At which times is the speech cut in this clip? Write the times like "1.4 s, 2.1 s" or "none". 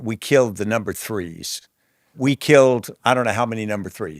2.2 s